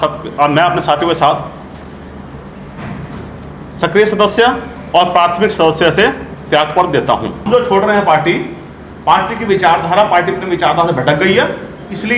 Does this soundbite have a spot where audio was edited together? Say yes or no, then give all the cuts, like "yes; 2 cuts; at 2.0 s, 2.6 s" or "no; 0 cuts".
yes; 1 cut; at 7.5 s